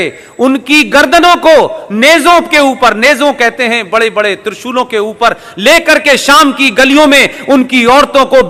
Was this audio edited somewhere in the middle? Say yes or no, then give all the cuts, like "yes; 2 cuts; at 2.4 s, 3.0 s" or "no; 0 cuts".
no; 0 cuts